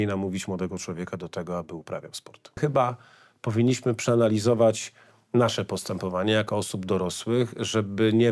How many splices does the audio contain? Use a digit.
1